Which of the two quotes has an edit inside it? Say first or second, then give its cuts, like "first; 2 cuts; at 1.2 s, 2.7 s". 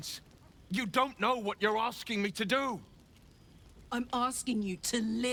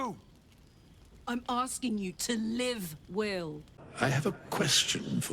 second; 1 cut; at 3.6 s